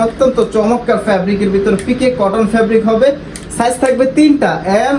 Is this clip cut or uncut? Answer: uncut